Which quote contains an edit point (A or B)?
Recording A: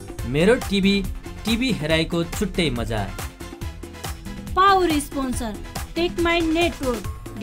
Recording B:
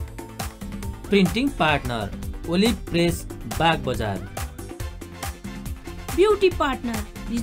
B